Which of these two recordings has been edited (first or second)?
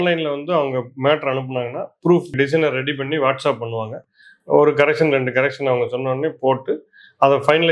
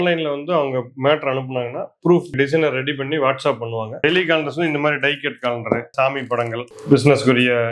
second